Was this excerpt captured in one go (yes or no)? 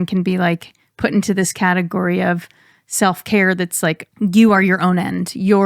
no